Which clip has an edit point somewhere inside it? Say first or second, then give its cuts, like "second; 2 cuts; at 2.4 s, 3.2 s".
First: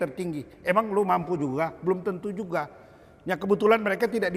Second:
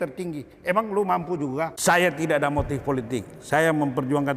second; 1 cut; at 1.8 s